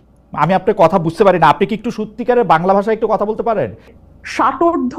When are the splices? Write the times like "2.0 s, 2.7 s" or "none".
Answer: 3.9 s